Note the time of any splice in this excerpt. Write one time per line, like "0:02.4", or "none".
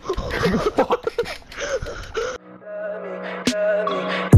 0:02.3